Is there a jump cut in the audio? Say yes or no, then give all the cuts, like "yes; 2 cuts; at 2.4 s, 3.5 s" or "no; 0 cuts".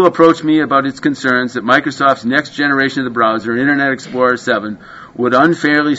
no; 0 cuts